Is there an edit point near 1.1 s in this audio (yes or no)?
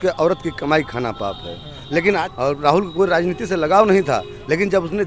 no